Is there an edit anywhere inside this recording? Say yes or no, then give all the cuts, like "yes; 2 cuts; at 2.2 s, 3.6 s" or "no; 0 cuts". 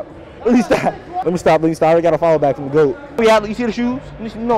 yes; 2 cuts; at 1.1 s, 3.0 s